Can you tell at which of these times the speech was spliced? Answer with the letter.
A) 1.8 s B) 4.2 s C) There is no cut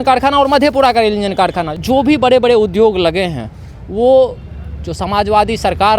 A